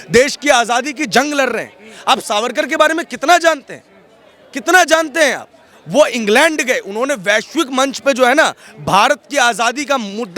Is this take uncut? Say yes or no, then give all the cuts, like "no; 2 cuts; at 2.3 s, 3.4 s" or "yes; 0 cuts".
yes; 0 cuts